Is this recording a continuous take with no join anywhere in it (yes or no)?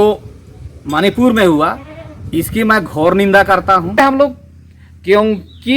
no